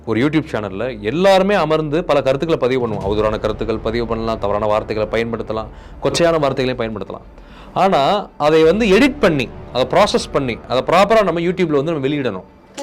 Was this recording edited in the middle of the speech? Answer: no; 0 cuts

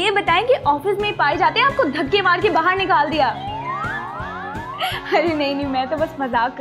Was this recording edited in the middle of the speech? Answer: no; 0 cuts

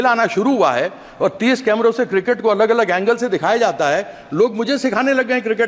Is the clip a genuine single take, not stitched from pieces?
yes; 0 cuts

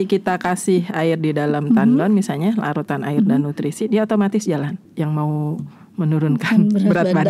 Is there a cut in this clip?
yes; 1 cut; at 4.8 s

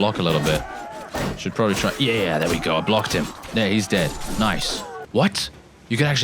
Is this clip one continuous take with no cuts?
no; 1 cut; at 5.0 s

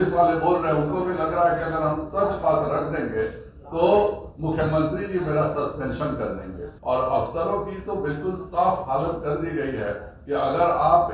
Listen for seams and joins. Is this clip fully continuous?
no; 1 cut; at 6.7 s

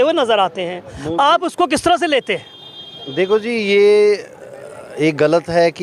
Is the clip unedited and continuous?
yes; 0 cuts

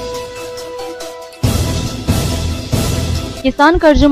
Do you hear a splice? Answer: yes; 1 cut; at 1.2 s

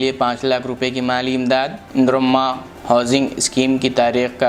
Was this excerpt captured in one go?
yes; 0 cuts

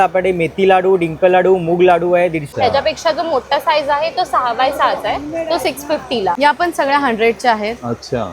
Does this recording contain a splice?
yes; 2 cuts; at 2.4 s, 6.4 s

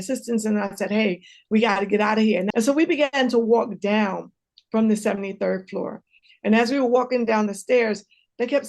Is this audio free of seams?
no; 1 cut; at 2.5 s

